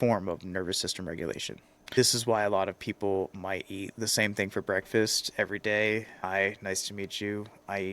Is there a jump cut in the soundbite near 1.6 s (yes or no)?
no